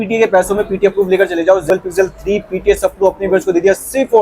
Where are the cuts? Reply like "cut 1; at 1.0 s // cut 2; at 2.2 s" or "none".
cut 1; at 1.7 s